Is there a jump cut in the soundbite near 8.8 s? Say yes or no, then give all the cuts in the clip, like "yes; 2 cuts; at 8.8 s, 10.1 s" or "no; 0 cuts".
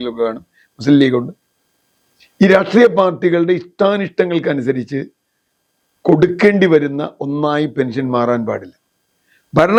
no; 0 cuts